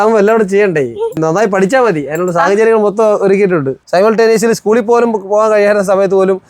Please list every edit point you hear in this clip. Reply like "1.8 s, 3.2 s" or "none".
1.2 s, 3.8 s